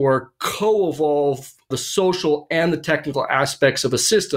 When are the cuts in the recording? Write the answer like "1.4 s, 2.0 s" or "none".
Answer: 1.7 s